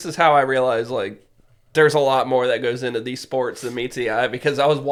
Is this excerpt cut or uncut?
uncut